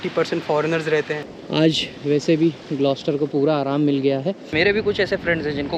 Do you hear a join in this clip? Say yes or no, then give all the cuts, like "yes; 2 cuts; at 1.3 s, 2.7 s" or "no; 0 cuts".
yes; 2 cuts; at 1.2 s, 4.5 s